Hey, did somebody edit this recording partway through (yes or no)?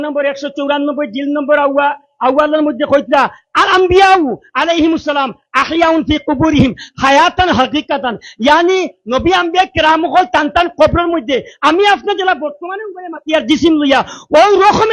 no